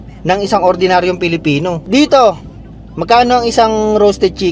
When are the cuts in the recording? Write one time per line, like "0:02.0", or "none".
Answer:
0:01.8

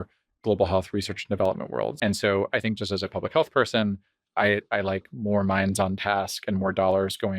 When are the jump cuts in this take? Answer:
0:02.0

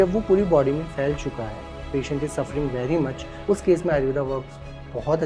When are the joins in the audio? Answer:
0:03.3

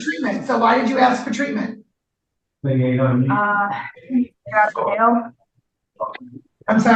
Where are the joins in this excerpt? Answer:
none

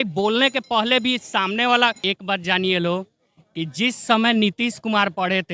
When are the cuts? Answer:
0:02.3

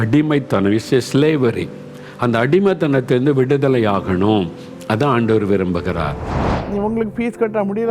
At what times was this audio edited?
0:06.4

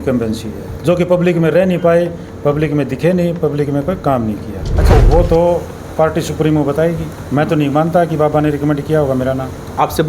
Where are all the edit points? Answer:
0:04.9

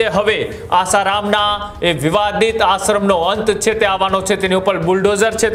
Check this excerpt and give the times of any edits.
none

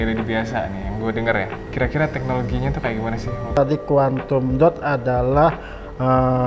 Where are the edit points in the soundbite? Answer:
0:01.5
0:03.6

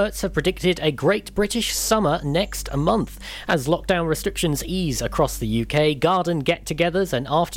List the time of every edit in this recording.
none

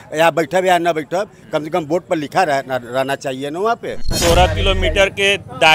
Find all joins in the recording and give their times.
0:04.2

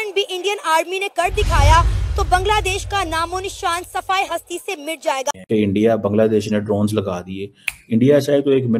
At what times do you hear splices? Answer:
0:05.3

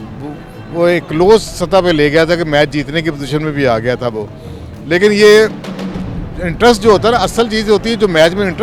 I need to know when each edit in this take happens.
none

